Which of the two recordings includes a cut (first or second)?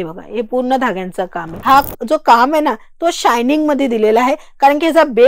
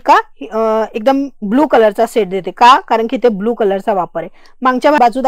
first